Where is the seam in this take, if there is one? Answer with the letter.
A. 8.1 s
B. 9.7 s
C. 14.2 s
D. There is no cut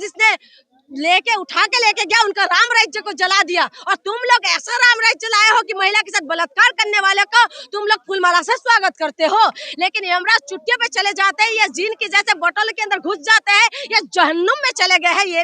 B